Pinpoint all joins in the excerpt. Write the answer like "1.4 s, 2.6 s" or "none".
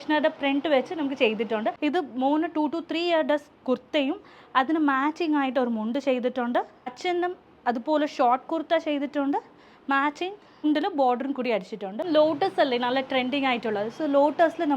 1.8 s, 12.0 s